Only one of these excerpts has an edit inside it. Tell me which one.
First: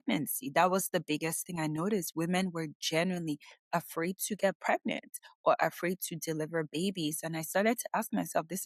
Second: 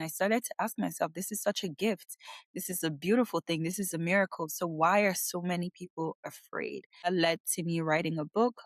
second; 1 cut; at 7.1 s

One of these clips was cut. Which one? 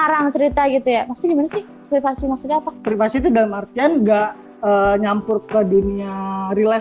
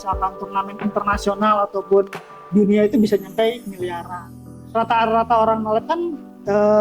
second; 1 cut; at 4.6 s

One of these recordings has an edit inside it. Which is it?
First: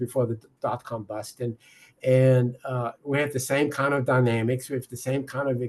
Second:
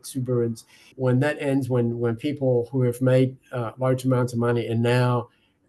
second; 1 cut; at 0.9 s

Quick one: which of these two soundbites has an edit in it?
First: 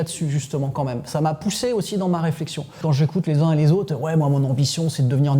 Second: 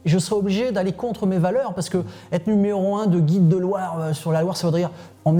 first; 1 cut; at 2.8 s

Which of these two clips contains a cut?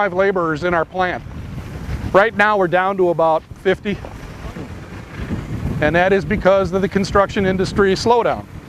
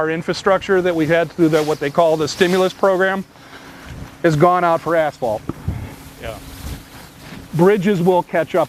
first; 1 cut; at 2.4 s

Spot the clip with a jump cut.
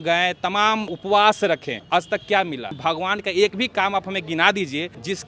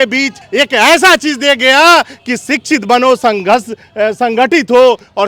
first; 2 cuts; at 0.9 s, 2.7 s

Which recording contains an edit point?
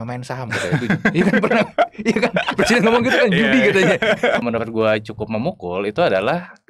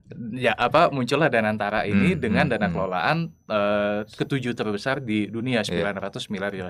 first; 1 cut; at 4.4 s

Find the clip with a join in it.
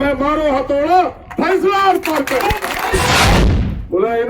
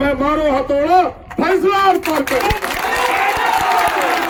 first; 1 cut; at 3.4 s

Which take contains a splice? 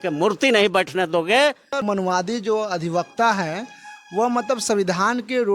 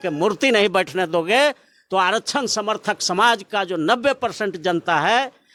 first; 1 cut; at 1.7 s

